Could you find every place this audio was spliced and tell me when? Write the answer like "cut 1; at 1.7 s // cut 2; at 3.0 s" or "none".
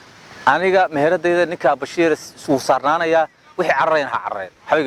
none